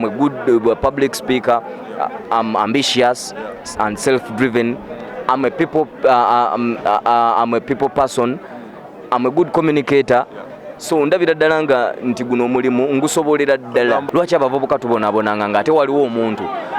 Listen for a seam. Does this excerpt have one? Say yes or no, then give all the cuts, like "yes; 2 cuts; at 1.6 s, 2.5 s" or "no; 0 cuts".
yes; 1 cut; at 14.0 s